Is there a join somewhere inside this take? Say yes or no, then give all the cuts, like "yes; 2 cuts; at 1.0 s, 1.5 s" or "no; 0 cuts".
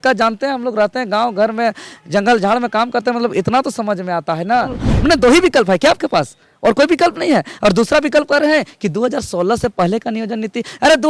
yes; 1 cut; at 4.9 s